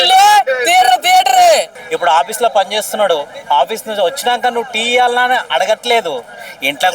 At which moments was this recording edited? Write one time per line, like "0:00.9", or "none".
0:01.8

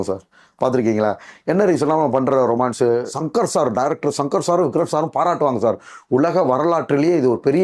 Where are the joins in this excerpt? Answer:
0:03.2

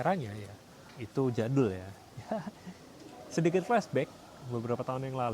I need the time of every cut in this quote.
none

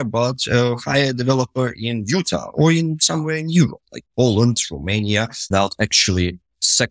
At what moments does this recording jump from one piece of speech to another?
0:05.5

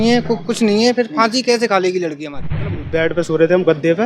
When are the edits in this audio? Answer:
0:02.8

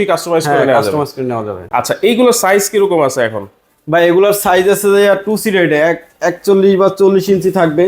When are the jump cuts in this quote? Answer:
none

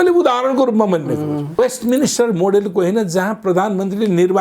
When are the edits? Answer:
0:01.6

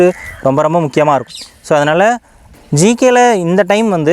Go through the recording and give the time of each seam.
0:02.5

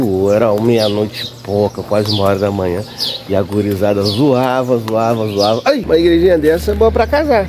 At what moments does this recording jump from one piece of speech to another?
0:05.8

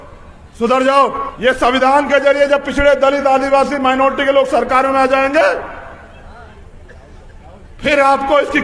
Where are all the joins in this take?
0:01.3

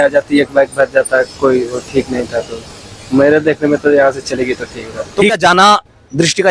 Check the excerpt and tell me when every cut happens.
0:05.3

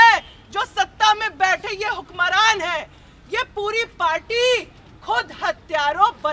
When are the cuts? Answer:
none

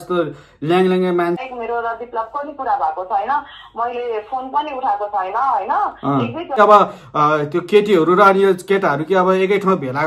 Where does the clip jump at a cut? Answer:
0:01.4
0:06.6

